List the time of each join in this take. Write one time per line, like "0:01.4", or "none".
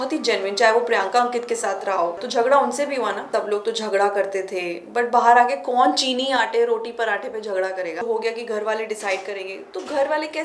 0:02.2
0:03.3
0:08.0

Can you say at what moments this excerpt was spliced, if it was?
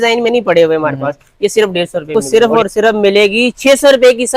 0:02.1

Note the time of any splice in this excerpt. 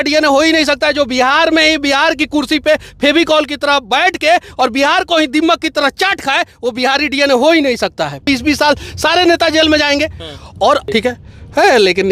0:08.2
0:10.8

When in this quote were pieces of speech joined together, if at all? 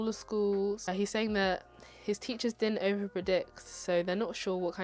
0:00.9

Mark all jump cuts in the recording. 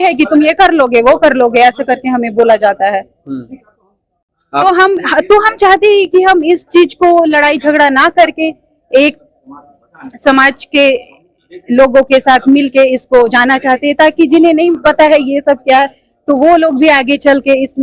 none

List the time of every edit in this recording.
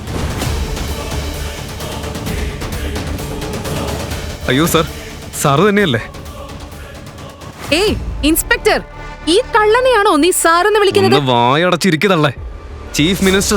0:04.3

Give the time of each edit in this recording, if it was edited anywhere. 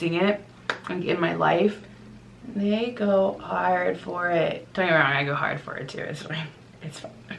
0:04.6

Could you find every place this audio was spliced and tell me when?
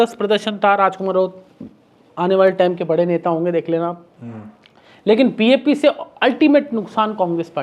none

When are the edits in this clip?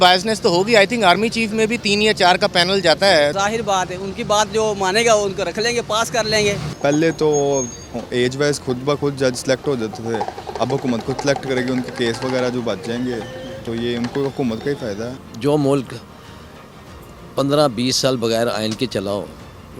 0:03.3
0:06.7
0:15.2

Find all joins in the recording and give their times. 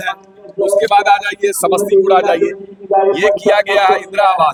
none

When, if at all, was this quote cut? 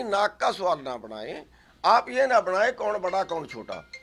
none

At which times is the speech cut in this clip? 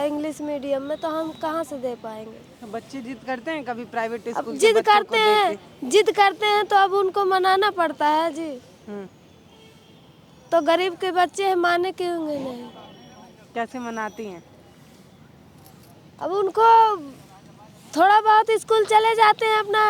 none

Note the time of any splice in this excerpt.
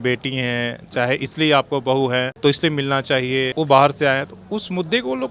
0:02.3
0:03.5

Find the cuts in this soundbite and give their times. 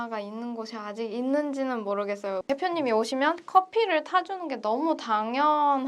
0:02.4

